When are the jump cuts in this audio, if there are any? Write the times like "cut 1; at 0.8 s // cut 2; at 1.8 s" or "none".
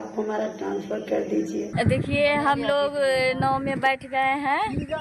cut 1; at 1.7 s